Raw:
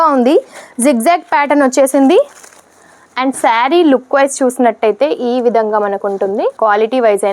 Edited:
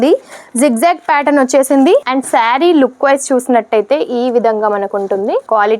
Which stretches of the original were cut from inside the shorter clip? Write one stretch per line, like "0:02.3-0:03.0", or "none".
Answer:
0:02.3-0:03.2